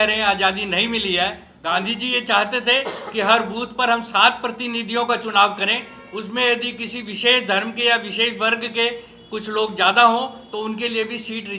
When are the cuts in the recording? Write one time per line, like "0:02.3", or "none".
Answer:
0:01.5